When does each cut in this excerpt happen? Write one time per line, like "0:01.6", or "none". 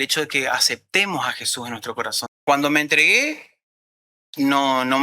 0:02.2

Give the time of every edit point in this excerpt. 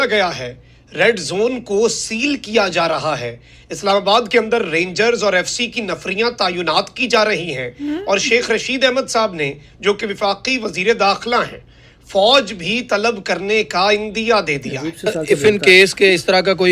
0:15.1

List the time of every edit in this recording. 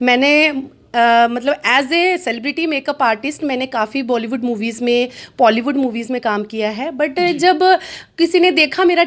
none

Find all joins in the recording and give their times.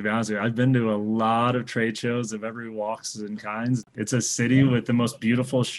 0:03.9

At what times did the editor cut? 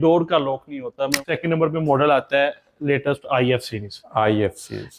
0:01.2

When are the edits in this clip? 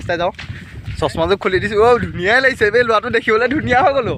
none

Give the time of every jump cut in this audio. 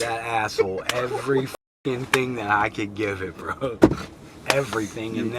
none

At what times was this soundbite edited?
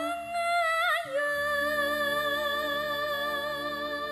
none

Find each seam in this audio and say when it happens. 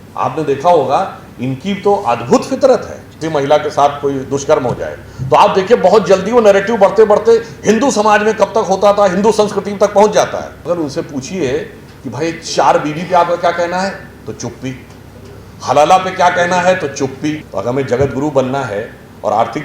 0:03.2
0:10.5
0:17.5

